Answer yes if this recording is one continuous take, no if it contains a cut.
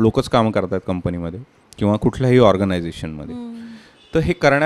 yes